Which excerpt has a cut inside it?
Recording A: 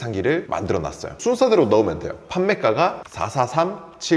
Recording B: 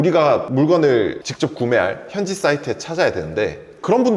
A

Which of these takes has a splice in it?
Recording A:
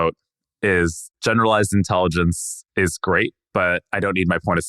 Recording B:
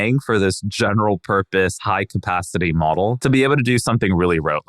B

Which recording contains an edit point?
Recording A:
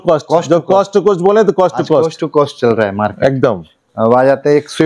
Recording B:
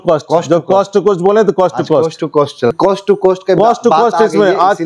B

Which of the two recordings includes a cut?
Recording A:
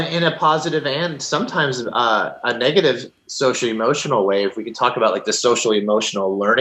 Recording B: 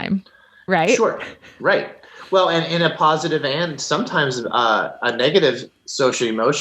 B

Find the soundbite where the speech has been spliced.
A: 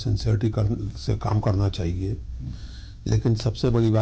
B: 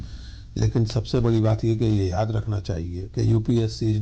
B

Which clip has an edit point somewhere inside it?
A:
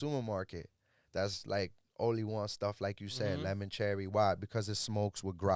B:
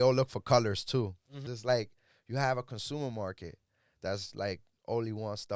B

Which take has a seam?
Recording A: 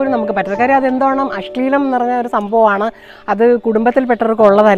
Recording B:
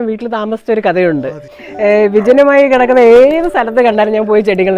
B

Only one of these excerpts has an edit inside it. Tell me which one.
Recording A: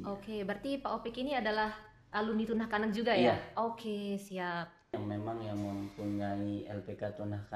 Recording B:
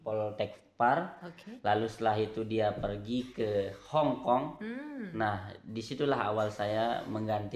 A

